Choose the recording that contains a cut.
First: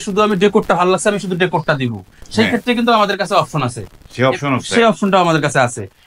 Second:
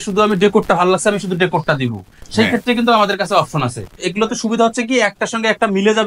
second; 1 cut; at 4.0 s

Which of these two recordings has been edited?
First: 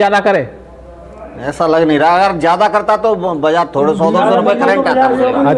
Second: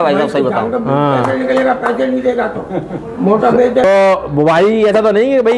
second; 1 cut; at 3.8 s

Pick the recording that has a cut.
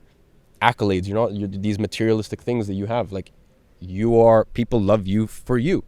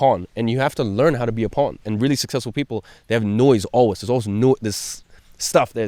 second; 1 cut; at 1.8 s

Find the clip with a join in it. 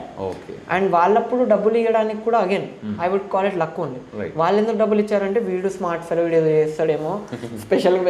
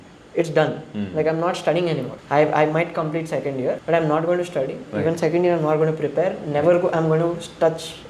second; 2 cuts; at 2.1 s, 3.8 s

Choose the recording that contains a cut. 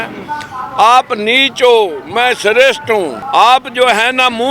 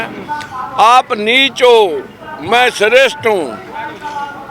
first; 2 cuts; at 2.0 s, 3.2 s

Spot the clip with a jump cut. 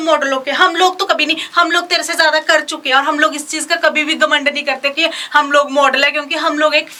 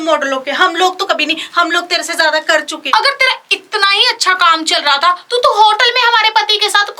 second; 1 cut; at 2.8 s

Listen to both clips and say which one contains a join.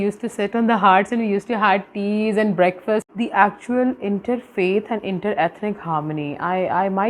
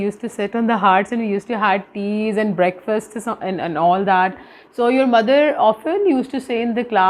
first; 1 cut; at 3.1 s

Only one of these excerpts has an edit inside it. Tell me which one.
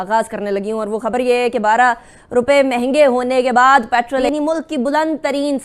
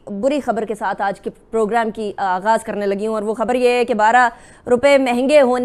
first; 1 cut; at 4.2 s

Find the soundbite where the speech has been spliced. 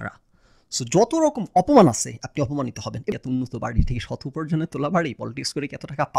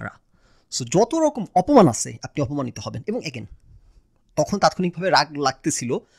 first; 1 cut; at 3.1 s

